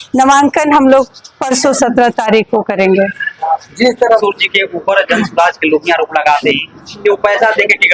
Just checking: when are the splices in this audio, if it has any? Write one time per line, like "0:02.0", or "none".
0:04.2